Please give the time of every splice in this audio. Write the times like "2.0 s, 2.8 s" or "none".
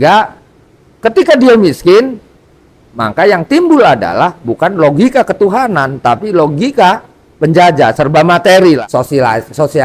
8.8 s

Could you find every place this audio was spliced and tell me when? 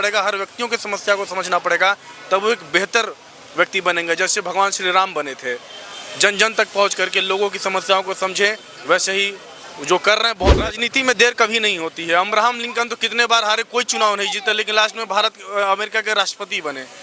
10.8 s

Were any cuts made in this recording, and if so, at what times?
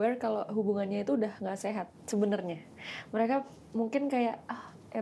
none

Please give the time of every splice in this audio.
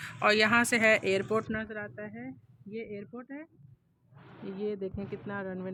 none

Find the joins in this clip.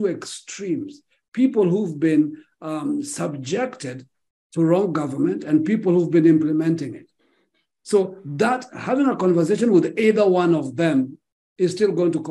none

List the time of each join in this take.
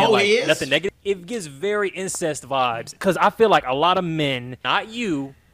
0.8 s, 2.9 s, 4.5 s

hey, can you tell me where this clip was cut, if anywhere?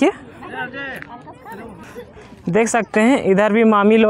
none

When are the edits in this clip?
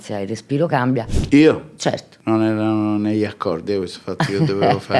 1.2 s, 2.1 s

